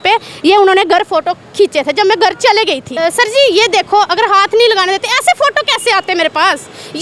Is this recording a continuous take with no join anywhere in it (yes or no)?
no